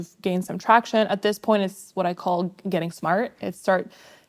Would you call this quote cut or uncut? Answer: uncut